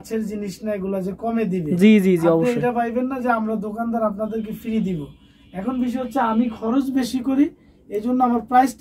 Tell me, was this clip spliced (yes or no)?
no